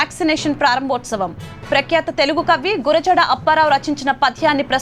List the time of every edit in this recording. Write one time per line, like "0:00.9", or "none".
none